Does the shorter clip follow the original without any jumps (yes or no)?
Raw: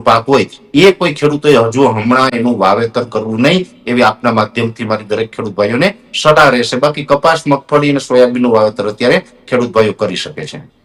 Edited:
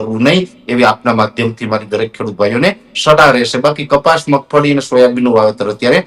yes